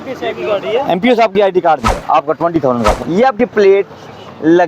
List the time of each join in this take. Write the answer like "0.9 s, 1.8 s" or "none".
1.9 s, 3.0 s